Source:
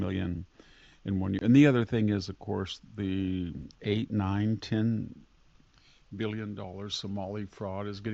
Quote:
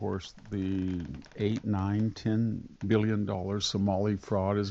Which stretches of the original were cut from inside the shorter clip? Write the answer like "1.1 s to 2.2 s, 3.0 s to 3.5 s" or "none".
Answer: 5.2 s to 6.0 s